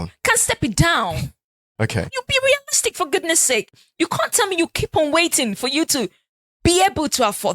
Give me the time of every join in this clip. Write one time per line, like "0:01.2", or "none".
0:02.1